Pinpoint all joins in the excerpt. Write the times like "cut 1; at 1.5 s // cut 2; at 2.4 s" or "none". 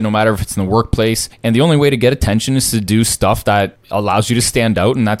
cut 1; at 1.3 s // cut 2; at 3.8 s